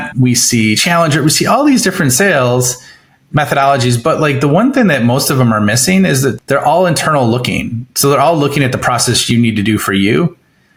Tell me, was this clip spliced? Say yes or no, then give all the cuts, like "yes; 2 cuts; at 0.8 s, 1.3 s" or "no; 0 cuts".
no; 0 cuts